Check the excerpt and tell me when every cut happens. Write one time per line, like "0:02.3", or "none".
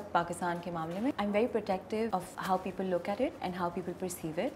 0:01.1
0:02.2
0:03.4